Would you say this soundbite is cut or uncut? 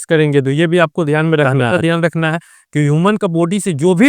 cut